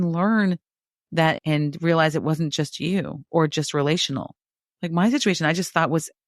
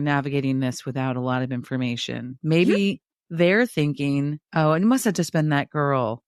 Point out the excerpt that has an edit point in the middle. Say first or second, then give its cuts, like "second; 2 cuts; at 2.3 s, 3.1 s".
first; 1 cut; at 1.4 s